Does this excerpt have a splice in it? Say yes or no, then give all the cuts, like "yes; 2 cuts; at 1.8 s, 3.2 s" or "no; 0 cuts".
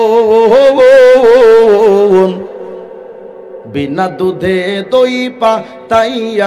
no; 0 cuts